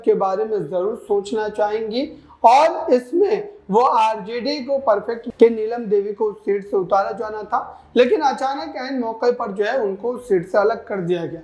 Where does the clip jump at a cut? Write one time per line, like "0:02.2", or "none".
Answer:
0:05.2